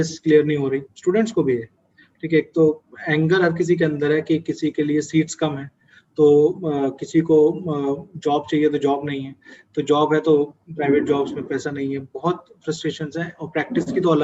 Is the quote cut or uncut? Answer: uncut